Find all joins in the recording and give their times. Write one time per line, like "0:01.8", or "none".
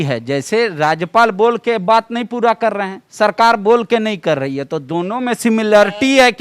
none